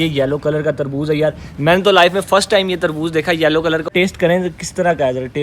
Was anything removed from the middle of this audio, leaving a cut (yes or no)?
yes